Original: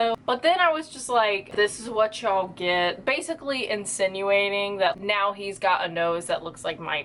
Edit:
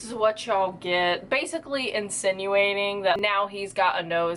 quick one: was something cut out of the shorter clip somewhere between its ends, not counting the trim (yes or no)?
yes